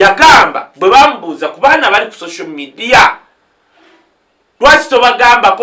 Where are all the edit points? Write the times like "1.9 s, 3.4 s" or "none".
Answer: none